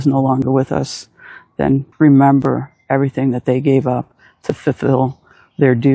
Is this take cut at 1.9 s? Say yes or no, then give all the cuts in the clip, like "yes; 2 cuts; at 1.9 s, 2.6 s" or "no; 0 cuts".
yes; 1 cut; at 1.9 s